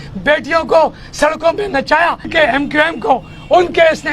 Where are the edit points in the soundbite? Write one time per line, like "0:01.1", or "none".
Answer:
0:02.2